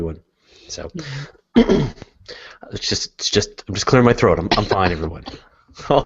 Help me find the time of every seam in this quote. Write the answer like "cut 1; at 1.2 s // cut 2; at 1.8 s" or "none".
cut 1; at 0.9 s